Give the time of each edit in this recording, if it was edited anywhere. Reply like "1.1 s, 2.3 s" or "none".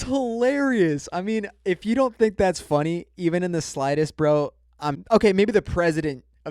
5.0 s